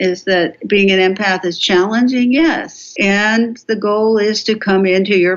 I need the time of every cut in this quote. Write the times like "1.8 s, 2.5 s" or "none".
2.8 s